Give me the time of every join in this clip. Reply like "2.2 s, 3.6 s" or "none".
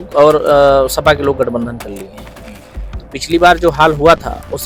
none

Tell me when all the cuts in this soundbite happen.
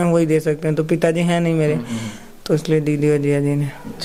none

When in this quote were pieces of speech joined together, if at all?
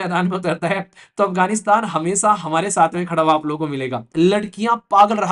4.1 s

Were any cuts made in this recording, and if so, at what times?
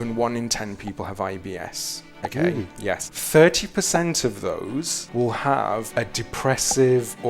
3.1 s, 5.0 s, 5.9 s

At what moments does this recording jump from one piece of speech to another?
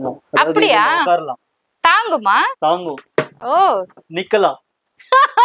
none

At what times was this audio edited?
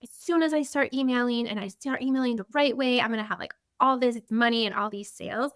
4.2 s

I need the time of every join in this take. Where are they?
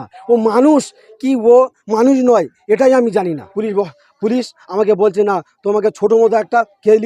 3.5 s

